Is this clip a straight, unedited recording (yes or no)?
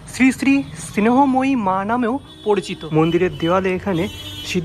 no